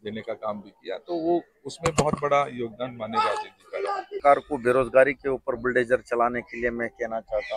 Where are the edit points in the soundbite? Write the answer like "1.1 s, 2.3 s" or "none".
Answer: 4.2 s